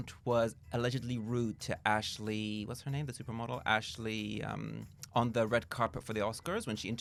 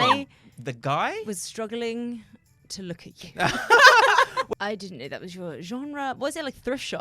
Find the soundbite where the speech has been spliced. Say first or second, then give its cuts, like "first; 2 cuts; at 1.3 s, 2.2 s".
second; 1 cut; at 4.5 s